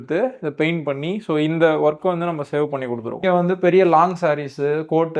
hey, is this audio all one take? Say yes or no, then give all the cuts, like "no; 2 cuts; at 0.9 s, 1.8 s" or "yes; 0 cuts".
no; 1 cut; at 3.2 s